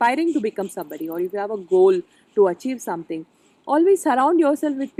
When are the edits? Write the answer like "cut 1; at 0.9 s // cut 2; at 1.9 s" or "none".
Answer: none